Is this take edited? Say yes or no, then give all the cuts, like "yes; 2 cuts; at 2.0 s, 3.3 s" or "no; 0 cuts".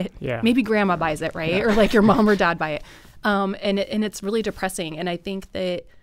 no; 0 cuts